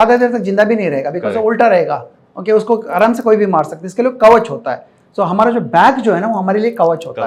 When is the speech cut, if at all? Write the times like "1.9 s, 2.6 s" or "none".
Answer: none

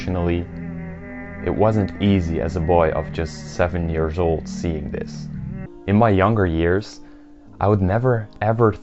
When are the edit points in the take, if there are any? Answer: 5.7 s

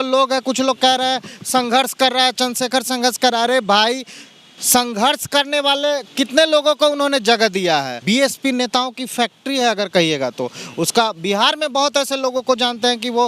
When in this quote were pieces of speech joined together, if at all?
8.0 s

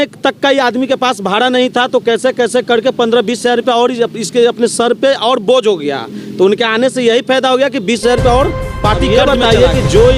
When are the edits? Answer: 9.0 s

